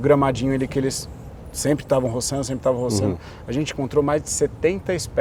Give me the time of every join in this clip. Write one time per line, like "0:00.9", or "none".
none